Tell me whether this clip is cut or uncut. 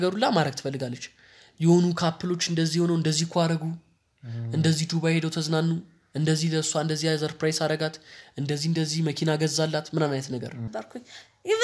cut